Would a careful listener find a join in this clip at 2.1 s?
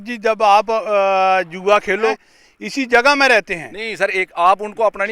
yes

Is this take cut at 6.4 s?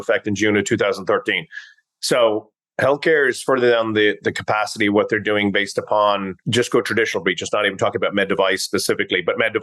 yes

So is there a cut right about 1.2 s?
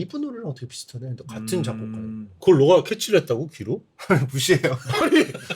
no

